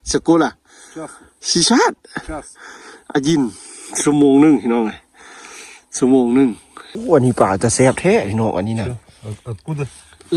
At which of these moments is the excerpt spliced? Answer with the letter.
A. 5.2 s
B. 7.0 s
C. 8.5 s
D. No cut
B